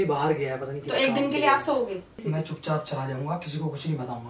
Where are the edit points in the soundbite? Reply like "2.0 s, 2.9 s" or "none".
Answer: 2.2 s